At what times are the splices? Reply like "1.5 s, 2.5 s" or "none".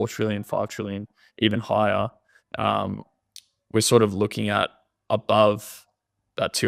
none